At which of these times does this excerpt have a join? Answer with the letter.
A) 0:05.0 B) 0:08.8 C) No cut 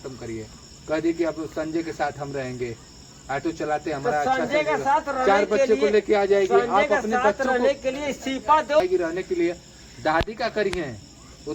B